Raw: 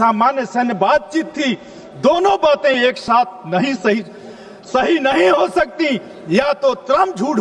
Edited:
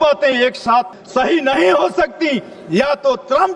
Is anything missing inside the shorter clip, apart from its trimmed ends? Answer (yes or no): yes